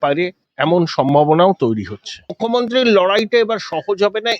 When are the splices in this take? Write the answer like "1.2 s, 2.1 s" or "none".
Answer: 2.4 s